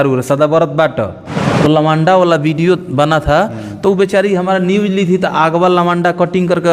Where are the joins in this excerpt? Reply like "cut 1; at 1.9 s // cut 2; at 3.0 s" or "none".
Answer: cut 1; at 1.4 s